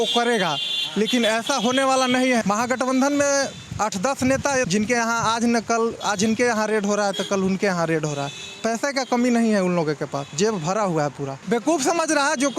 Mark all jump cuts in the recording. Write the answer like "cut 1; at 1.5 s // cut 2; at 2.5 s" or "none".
cut 1; at 2.4 s // cut 2; at 4.7 s // cut 3; at 11.4 s